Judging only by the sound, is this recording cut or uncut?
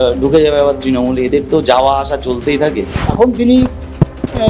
cut